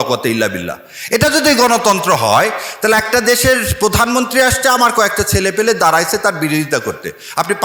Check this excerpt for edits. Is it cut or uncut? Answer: uncut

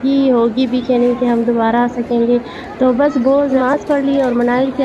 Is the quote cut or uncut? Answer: cut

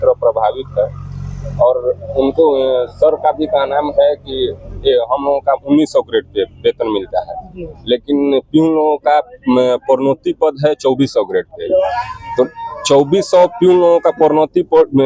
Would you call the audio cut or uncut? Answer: uncut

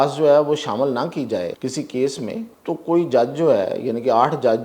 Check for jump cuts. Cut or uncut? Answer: cut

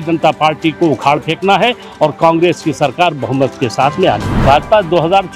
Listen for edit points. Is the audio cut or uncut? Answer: cut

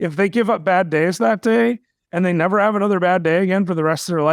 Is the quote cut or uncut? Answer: uncut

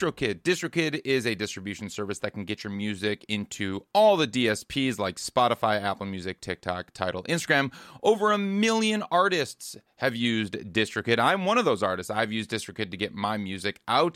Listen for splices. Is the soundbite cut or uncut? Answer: uncut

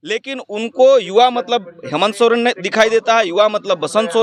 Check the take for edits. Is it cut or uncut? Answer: uncut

